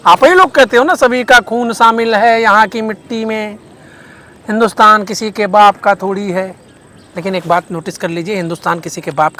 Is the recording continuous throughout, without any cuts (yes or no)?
yes